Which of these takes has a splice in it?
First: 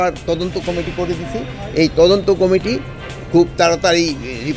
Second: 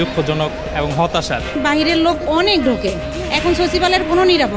second; 1 cut; at 1.6 s

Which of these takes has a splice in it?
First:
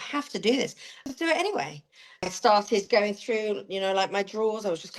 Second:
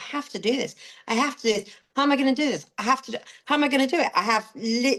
first; 2 cuts; at 1.0 s, 2.3 s

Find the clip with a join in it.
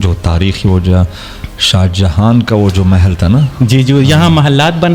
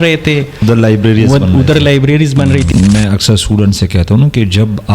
second; 1 cut; at 2.7 s

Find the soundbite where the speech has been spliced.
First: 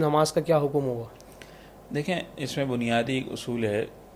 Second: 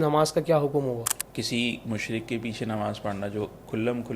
second; 1 cut; at 1.2 s

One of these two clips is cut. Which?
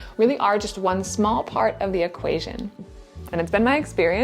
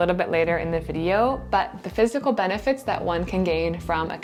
first; 1 cut; at 2.9 s

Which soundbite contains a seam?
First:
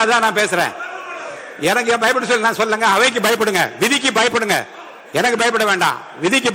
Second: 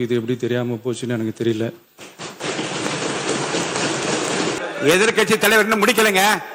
second; 1 cut; at 4.6 s

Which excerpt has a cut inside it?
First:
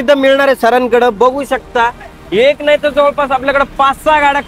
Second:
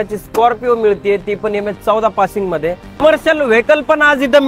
second; 1 cut; at 3.0 s

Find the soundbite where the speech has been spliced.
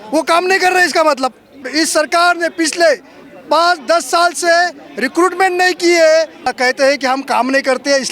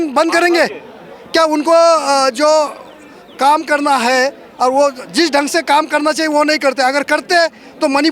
first; 2 cuts; at 1.7 s, 6.5 s

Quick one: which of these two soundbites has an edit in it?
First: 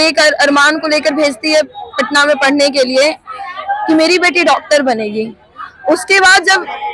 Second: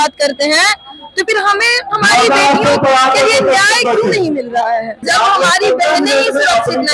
second; 1 cut; at 5.0 s

